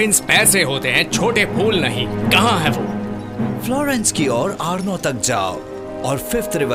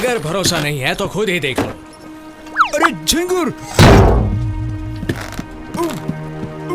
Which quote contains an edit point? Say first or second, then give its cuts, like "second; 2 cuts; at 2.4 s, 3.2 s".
second; 1 cut; at 4.9 s